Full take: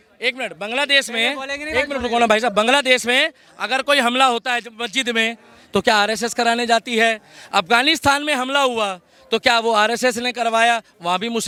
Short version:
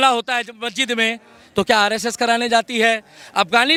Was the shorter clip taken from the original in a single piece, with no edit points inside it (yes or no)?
yes